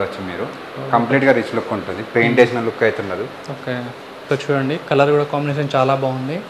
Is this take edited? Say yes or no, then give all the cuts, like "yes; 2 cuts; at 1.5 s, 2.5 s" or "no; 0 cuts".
no; 0 cuts